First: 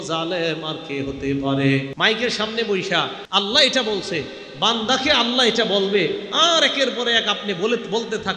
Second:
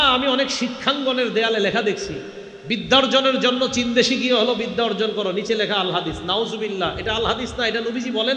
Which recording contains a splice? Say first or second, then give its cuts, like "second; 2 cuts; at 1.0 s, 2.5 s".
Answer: first; 2 cuts; at 1.9 s, 3.2 s